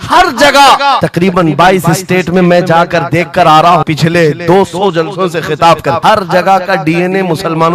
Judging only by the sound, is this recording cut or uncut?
cut